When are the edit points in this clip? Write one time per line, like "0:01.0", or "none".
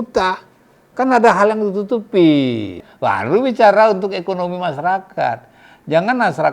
0:02.9